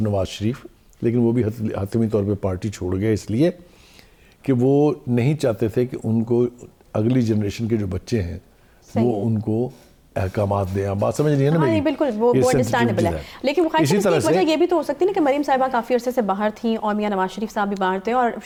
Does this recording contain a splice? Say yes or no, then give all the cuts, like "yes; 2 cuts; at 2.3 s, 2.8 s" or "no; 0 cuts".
no; 0 cuts